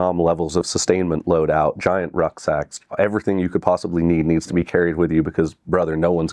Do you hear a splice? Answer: no; 0 cuts

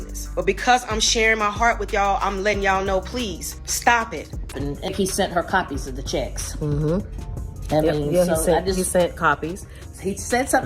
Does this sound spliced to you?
yes; 1 cut; at 4.4 s

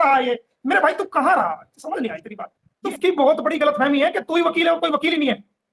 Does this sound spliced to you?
yes; 1 cut; at 2.8 s

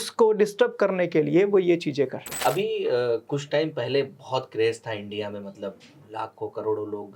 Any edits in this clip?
yes; 1 cut; at 2.4 s

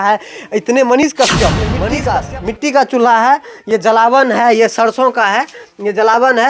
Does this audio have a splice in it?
yes; 1 cut; at 1.8 s

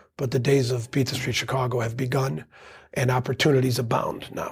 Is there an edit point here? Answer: no; 0 cuts

